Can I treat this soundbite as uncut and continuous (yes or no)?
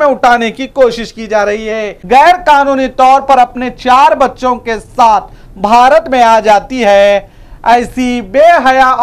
no